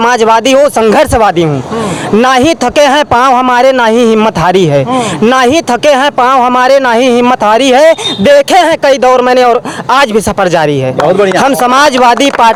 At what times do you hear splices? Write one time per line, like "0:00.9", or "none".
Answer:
none